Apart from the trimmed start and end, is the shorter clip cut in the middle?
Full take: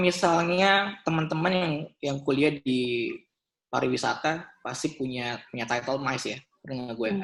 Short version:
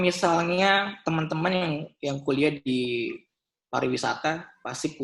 no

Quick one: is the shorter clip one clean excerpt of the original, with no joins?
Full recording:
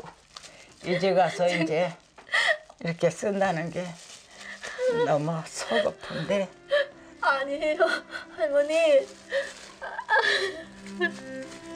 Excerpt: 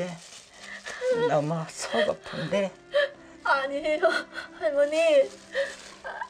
yes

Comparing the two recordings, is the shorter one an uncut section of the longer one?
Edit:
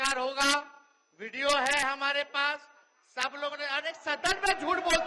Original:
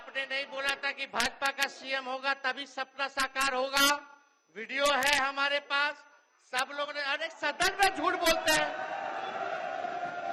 yes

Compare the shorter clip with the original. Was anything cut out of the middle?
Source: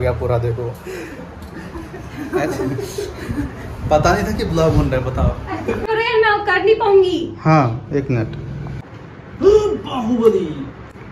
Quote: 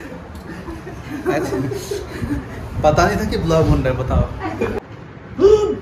yes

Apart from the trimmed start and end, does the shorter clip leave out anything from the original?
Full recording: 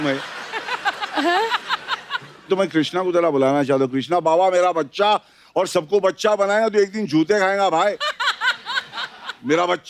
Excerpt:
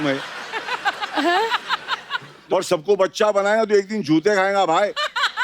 yes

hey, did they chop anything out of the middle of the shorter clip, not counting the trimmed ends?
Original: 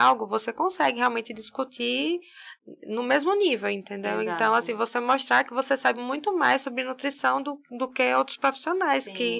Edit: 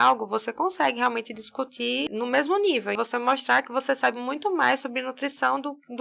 yes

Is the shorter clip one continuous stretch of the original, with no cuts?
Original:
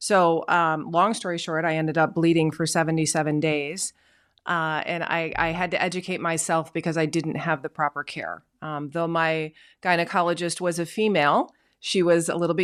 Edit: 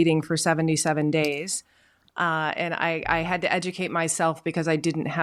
yes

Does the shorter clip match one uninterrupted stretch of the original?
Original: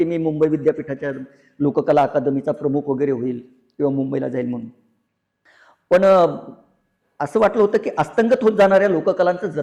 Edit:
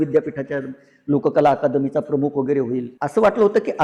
no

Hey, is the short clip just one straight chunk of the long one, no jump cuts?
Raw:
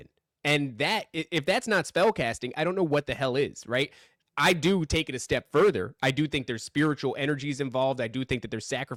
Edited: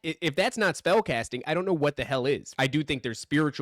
no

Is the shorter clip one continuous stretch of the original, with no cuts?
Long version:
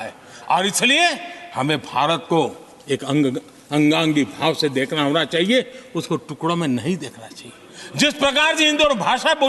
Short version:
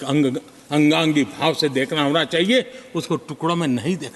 yes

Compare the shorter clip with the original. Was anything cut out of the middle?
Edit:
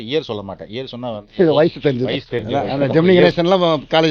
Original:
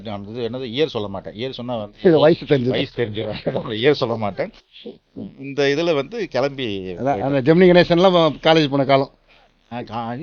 yes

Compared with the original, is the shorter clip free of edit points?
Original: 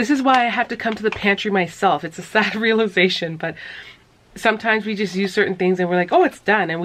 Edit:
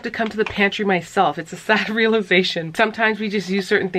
no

